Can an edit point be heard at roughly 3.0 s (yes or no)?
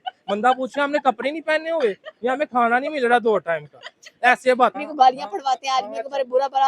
no